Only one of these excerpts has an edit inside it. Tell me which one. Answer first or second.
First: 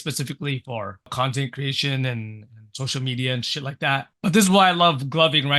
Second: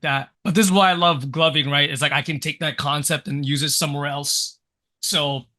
first